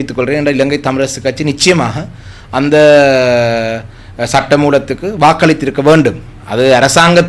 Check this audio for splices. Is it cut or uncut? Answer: uncut